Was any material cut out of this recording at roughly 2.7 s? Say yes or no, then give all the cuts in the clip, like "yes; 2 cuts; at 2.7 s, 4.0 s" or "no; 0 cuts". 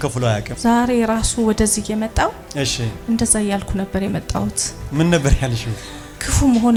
no; 0 cuts